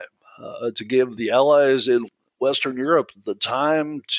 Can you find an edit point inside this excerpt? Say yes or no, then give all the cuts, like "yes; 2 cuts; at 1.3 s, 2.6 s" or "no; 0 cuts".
yes; 2 cuts; at 1.1 s, 2.1 s